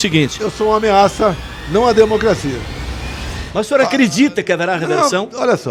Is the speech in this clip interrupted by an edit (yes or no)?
no